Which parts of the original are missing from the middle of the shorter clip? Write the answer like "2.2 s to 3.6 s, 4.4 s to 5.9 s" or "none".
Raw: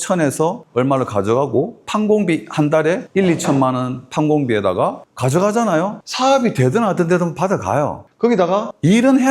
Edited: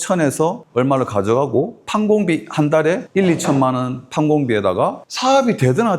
5.1 s to 6.0 s